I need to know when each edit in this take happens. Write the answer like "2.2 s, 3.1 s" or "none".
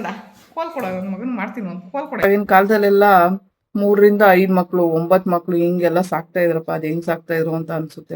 2.2 s